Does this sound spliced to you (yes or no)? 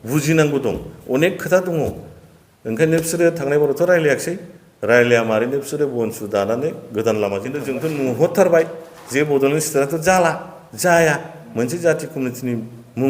yes